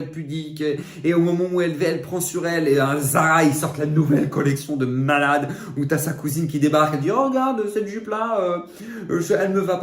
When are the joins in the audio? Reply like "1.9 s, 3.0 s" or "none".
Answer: none

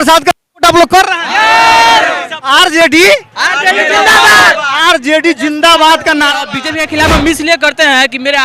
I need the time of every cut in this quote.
6.6 s

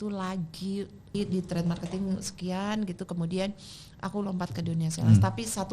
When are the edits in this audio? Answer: 1.1 s

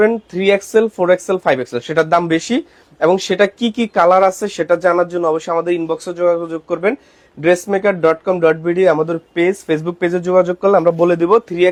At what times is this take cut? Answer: none

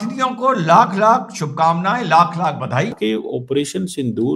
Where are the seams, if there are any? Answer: 3.0 s

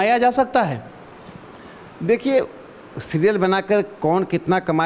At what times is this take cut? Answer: none

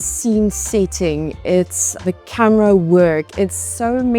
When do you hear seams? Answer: 2.0 s

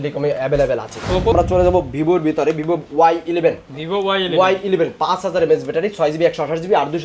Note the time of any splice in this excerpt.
1.3 s

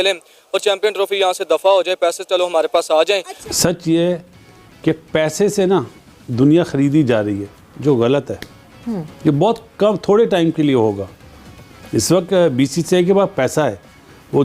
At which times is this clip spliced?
3.4 s

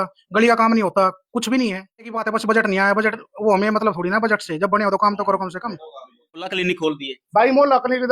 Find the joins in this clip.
2.2 s, 6.5 s

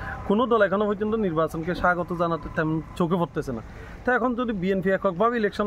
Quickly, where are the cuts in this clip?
none

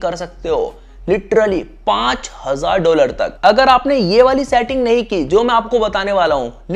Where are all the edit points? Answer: 3.3 s

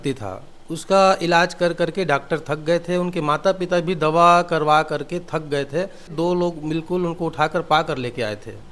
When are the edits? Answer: 6.1 s

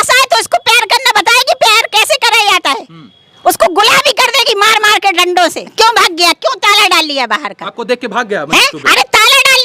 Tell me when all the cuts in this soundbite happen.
5.6 s

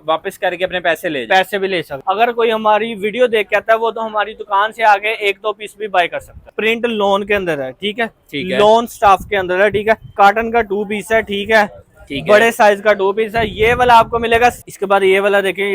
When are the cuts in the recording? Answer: 1.9 s, 6.5 s, 10.1 s, 14.6 s

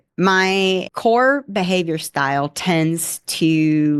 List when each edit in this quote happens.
0.9 s

